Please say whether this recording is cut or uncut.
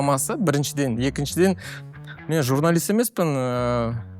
uncut